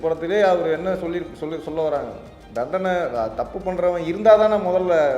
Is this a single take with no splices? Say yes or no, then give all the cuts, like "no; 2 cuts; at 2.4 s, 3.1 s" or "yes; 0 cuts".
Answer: yes; 0 cuts